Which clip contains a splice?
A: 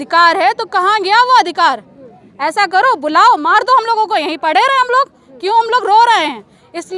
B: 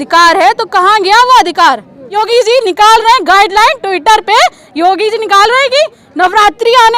B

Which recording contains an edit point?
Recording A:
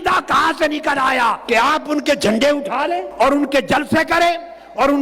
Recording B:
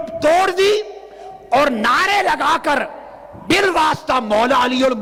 A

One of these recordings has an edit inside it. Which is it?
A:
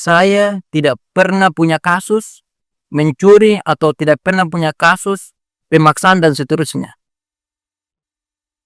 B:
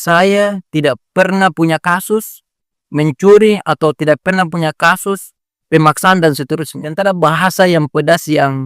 B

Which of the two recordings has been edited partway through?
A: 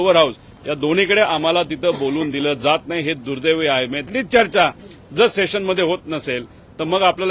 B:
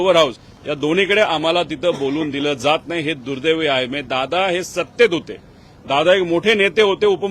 A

